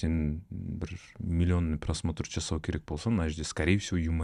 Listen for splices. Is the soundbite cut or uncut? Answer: uncut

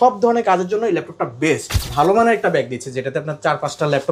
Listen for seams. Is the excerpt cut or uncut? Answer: cut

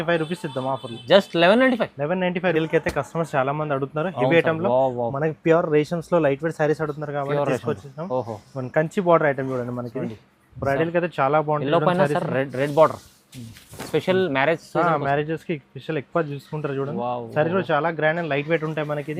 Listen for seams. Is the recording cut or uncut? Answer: cut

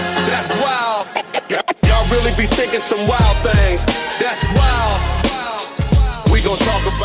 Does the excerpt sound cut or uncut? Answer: uncut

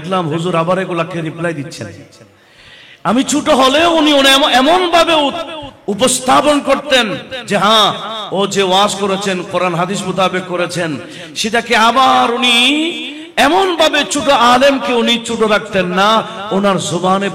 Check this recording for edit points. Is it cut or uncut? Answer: uncut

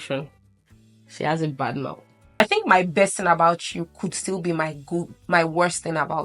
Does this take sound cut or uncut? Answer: cut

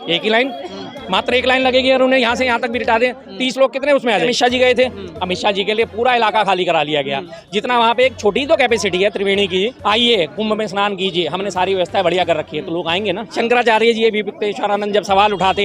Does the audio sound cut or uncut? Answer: cut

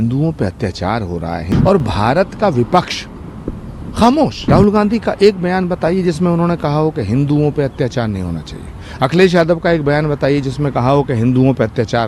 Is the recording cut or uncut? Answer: cut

